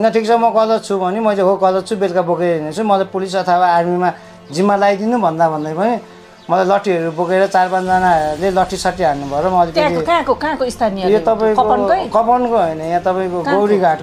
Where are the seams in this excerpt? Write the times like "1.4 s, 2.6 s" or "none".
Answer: none